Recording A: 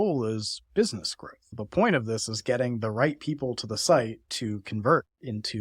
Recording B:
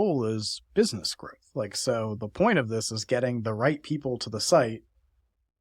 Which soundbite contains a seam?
A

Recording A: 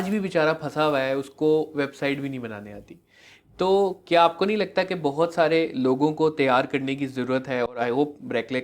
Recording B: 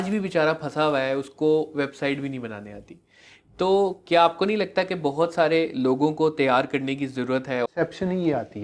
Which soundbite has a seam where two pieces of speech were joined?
B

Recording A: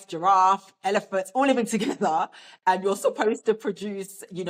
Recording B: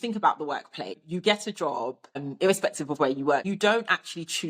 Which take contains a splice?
B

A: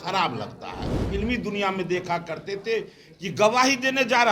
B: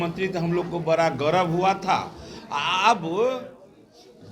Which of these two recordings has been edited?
A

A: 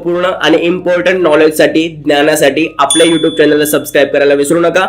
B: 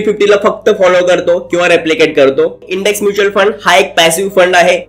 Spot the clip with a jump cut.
B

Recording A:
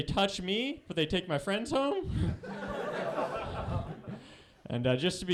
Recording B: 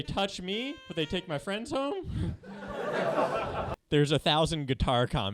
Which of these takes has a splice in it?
B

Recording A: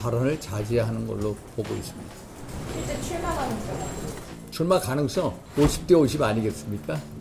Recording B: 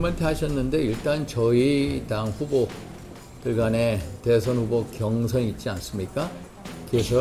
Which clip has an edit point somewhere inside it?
A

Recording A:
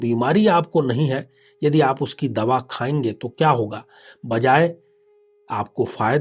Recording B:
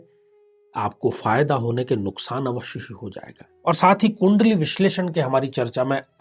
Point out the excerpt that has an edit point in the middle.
B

